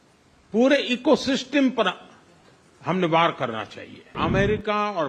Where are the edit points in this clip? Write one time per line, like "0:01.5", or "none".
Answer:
0:04.1